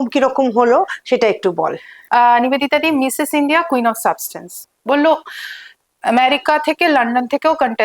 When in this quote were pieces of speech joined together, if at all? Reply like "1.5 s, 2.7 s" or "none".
4.6 s